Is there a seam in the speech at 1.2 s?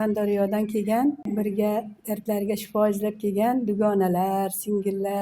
yes; 1 cut; at 1.2 s

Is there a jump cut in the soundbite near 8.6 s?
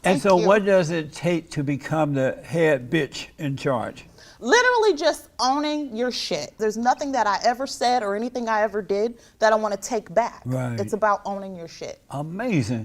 no; 1 cut; at 6.6 s

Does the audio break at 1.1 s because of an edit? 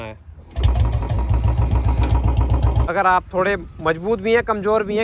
no; 1 cut; at 2.8 s

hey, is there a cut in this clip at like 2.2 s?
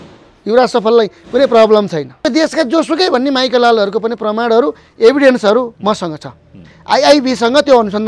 yes; 1 cut; at 2.2 s

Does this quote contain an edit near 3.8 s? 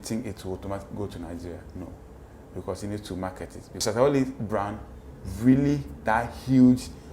yes; 1 cut; at 3.8 s

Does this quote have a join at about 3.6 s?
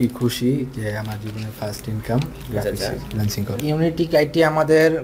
yes; 1 cut; at 3.6 s

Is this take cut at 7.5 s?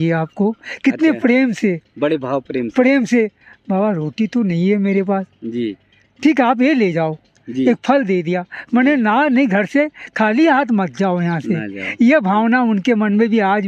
no; 0 cuts

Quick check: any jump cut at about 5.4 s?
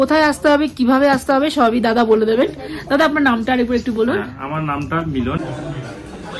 yes; 1 cut; at 5.4 s

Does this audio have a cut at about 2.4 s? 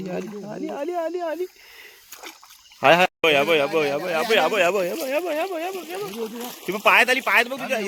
no; 0 cuts

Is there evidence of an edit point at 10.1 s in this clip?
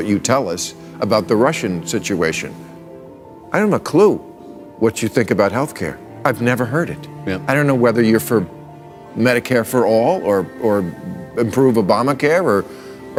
no; 0 cuts

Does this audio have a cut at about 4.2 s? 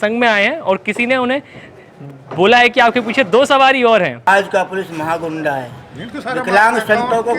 yes; 1 cut; at 4.2 s

